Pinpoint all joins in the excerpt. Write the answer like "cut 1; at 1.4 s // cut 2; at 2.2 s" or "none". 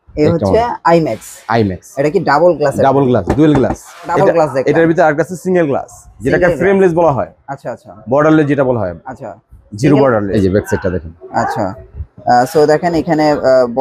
cut 1; at 4.1 s // cut 2; at 10.3 s